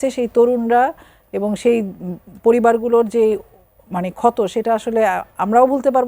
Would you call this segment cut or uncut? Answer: uncut